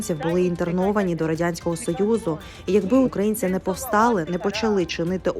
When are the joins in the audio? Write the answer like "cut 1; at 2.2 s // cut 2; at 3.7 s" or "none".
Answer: cut 1; at 3.1 s